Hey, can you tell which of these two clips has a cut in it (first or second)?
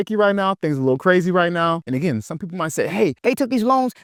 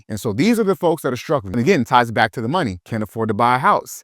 second